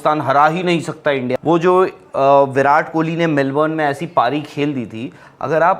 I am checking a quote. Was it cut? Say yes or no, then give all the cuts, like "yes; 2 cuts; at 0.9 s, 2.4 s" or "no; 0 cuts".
yes; 1 cut; at 1.3 s